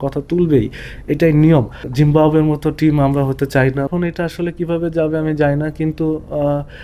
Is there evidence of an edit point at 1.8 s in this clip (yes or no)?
yes